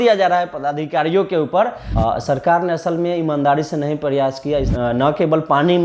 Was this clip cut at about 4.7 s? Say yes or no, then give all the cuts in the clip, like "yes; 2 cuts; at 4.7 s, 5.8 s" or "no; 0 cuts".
yes; 2 cuts; at 1.8 s, 4.7 s